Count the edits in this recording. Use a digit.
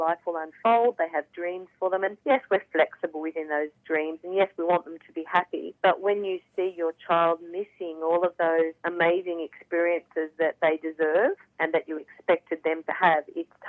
4